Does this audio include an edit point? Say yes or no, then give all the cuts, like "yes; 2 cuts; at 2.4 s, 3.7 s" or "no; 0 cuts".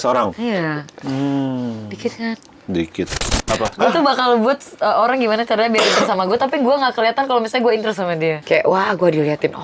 yes; 2 cuts; at 3.4 s, 8.4 s